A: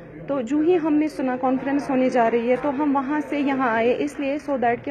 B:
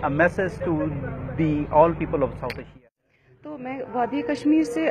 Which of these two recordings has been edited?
B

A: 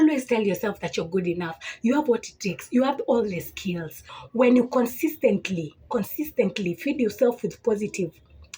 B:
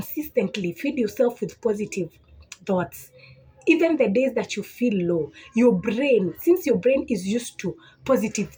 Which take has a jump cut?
A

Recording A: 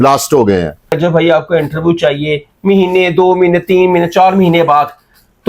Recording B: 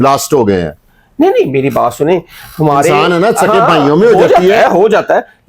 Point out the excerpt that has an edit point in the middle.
A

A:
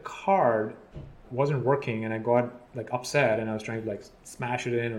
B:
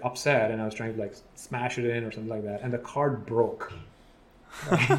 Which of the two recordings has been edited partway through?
A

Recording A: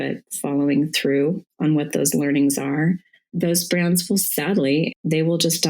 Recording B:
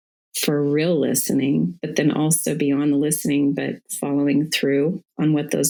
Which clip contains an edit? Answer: A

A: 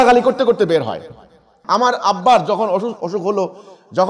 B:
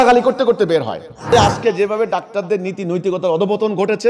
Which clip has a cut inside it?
B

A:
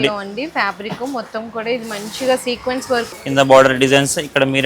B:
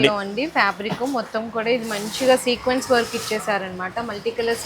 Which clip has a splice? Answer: A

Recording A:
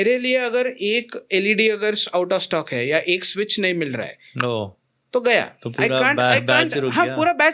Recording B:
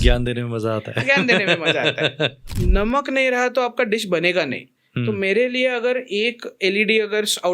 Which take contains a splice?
B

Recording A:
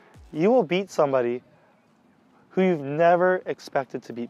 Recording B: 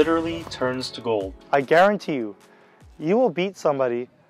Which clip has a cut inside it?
B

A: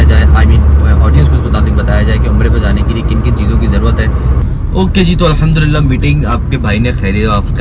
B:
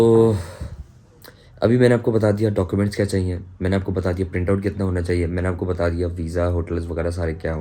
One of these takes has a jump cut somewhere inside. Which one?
A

